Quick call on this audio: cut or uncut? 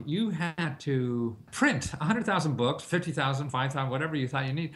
cut